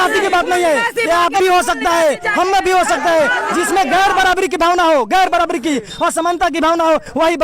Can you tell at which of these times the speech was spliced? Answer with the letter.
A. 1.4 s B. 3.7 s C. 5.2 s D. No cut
A